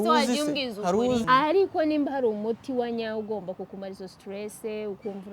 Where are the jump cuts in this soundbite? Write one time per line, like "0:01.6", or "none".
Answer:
0:01.2